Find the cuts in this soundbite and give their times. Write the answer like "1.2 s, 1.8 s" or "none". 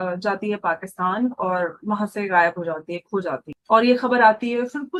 none